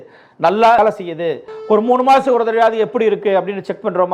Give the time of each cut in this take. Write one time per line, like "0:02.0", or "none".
0:01.5